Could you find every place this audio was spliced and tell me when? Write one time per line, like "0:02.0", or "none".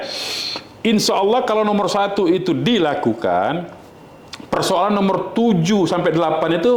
none